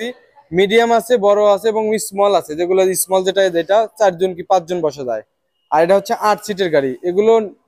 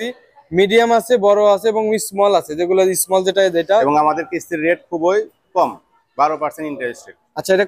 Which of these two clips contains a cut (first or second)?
second